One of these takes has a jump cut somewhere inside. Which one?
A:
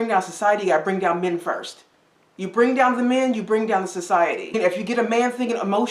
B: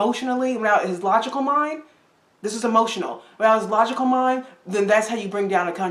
A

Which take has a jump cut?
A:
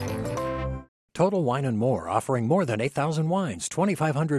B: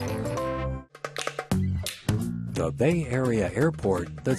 B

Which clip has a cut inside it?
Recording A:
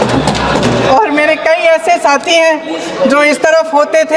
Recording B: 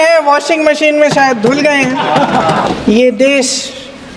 B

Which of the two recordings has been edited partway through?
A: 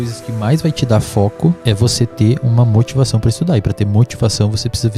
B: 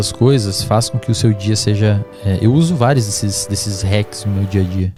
A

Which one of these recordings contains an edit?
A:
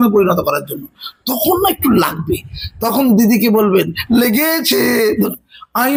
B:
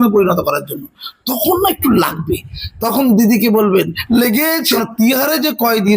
B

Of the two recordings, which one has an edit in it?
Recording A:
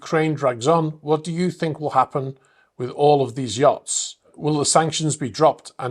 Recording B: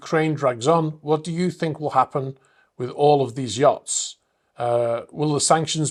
A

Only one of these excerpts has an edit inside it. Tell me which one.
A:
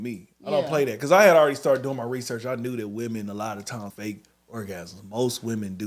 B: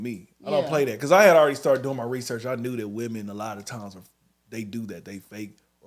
A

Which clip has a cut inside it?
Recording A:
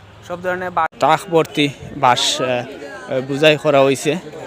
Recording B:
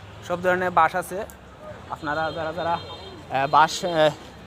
A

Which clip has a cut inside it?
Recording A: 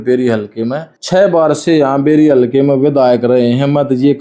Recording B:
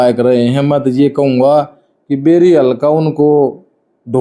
A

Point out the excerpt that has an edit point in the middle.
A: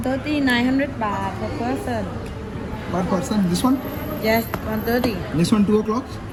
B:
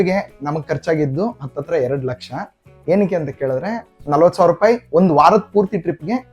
B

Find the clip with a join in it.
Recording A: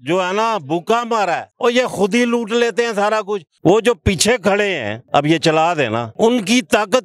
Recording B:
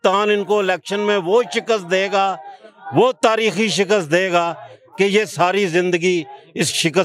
A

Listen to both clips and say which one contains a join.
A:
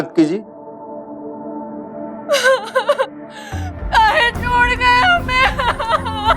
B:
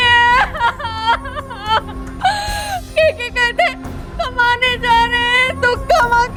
A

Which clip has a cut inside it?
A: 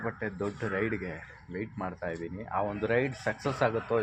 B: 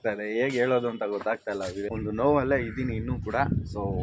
B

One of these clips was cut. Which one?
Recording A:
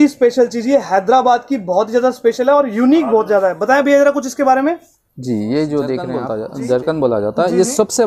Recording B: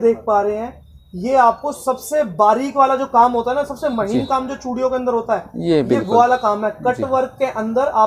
A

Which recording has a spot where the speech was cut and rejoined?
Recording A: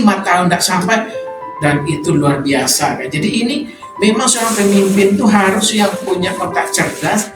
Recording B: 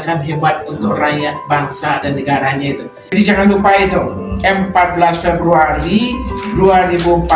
B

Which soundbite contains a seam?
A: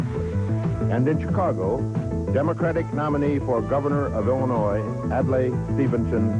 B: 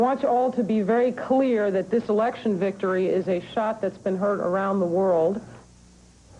B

